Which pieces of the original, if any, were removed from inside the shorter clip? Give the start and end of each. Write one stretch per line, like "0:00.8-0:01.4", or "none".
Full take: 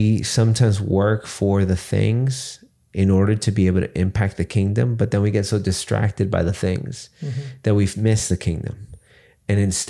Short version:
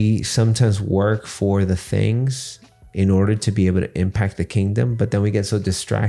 none